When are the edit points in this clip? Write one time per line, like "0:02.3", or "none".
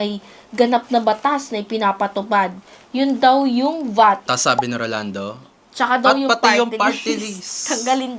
0:04.2